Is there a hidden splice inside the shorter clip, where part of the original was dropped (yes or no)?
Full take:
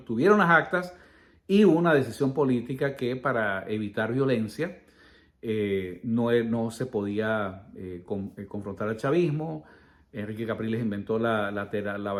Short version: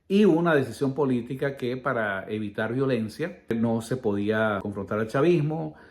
yes